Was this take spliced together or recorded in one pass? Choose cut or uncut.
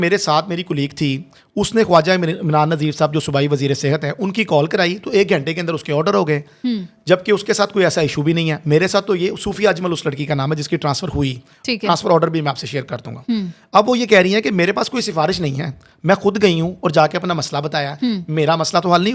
uncut